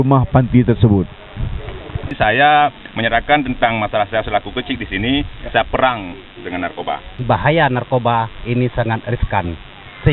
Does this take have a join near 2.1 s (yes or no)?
yes